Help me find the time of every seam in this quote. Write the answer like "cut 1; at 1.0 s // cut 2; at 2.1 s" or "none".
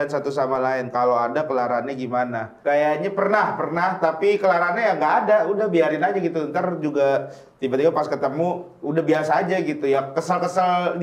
none